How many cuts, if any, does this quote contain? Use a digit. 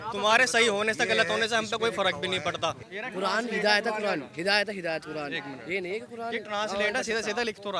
1